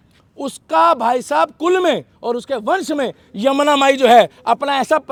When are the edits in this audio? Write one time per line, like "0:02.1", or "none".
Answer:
none